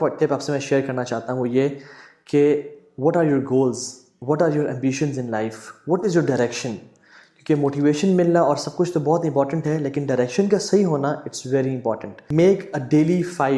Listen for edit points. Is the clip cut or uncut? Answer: cut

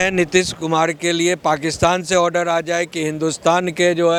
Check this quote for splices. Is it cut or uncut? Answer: uncut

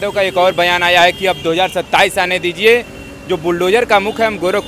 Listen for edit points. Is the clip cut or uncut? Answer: uncut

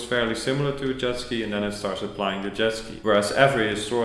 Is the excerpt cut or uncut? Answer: cut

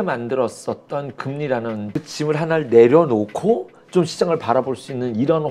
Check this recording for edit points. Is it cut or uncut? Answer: cut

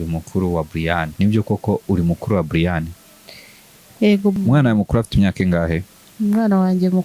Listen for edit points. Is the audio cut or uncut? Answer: cut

